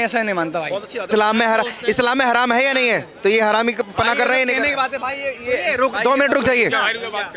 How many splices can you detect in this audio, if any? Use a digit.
1